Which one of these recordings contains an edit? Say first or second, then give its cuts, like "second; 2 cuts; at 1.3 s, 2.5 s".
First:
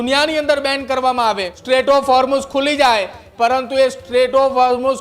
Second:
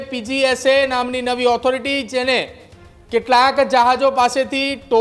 first; 1 cut; at 1.5 s